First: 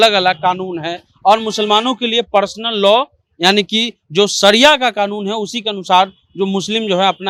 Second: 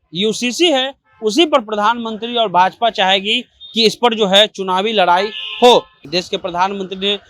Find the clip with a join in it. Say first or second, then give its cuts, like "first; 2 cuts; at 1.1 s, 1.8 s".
second; 1 cut; at 6.0 s